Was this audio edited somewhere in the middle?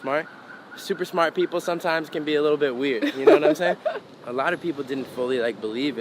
yes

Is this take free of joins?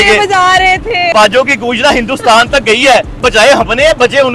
no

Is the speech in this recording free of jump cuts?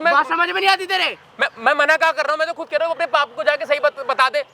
yes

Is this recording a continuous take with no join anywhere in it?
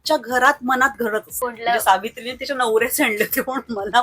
no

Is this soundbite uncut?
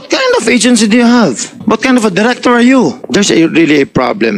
no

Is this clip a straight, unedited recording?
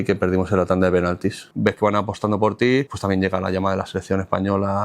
no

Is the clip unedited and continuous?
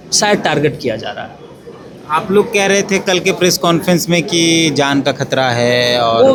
yes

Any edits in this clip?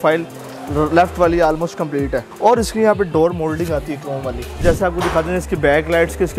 yes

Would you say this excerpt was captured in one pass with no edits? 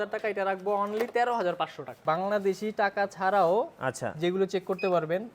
no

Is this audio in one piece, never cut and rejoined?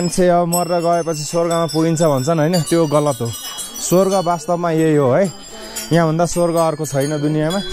yes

